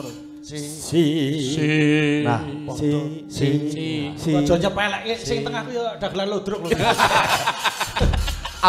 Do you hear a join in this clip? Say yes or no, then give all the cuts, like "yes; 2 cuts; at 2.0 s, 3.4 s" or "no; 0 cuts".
no; 0 cuts